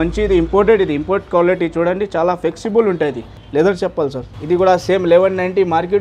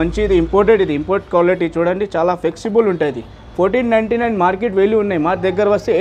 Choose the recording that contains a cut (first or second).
first